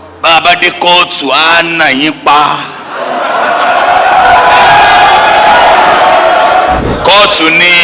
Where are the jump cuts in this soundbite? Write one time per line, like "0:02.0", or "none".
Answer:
0:06.8